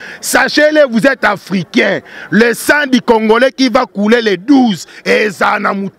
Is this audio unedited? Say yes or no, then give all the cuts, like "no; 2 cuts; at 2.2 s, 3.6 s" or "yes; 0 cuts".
yes; 0 cuts